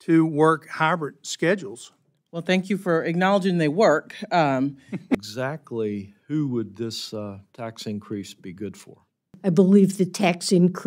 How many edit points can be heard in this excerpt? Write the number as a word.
two